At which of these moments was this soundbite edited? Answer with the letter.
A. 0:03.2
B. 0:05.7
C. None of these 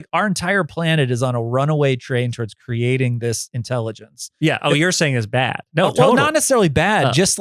B